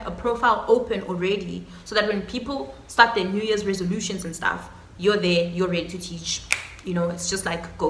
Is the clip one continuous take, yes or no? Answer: yes